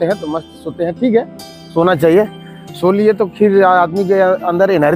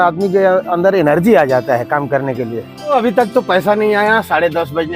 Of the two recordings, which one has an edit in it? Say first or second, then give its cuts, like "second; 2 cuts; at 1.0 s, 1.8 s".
second; 1 cut; at 2.9 s